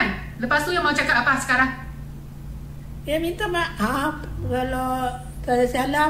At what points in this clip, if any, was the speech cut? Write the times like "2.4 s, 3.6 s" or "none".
none